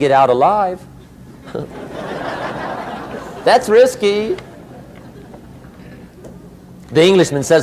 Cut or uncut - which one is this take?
uncut